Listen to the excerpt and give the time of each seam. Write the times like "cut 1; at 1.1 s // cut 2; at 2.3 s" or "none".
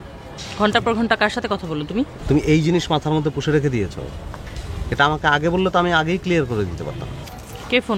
cut 1; at 2.2 s